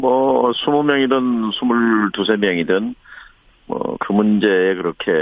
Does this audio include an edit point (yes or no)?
no